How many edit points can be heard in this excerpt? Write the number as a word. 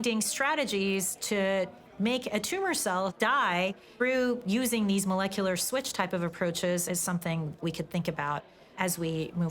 two